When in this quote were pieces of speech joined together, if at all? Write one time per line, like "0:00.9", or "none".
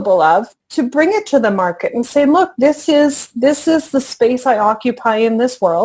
none